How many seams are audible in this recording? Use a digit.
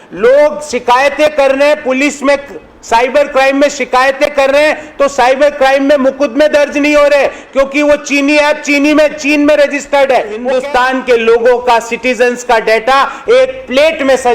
1